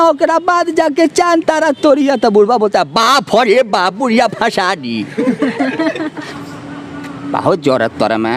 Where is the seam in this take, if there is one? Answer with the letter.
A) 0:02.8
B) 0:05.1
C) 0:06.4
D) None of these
C